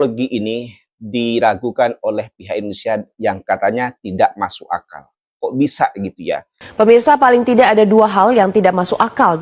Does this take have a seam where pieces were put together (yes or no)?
yes